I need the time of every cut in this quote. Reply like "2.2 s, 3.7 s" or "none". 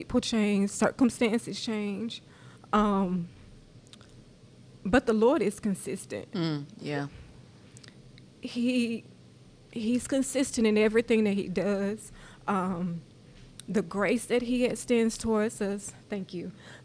none